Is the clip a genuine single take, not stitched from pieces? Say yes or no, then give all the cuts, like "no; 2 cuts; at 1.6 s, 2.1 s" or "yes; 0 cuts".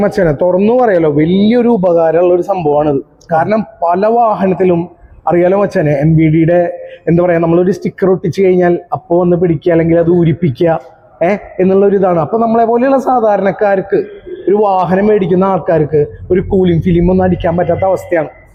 yes; 0 cuts